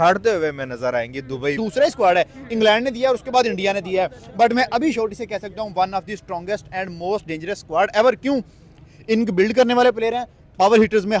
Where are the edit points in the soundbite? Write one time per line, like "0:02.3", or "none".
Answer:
0:01.6

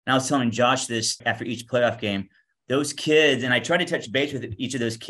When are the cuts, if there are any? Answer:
0:01.2

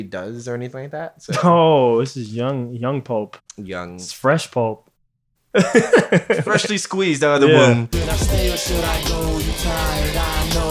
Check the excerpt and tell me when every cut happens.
0:07.9

